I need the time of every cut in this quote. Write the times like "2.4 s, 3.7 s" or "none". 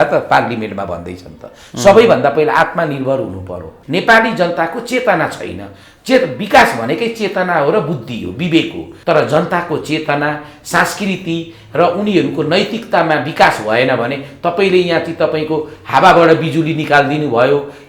3.7 s, 8.9 s